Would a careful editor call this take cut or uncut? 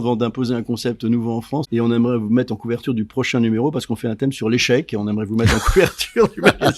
cut